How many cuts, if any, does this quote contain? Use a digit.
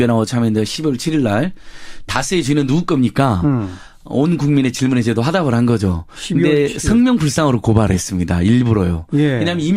1